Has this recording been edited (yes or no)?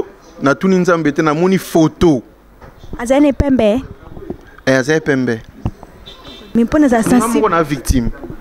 yes